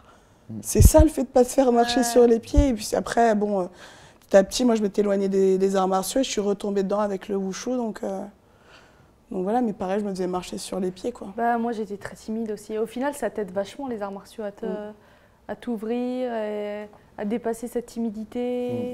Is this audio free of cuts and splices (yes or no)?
yes